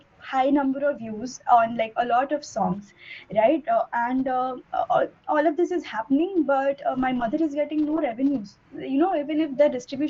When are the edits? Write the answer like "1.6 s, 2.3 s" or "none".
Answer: none